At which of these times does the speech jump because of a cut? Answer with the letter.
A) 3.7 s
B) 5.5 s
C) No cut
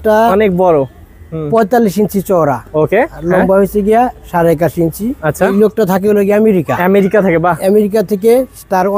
B